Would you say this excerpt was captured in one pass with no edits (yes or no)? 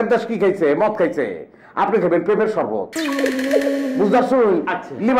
yes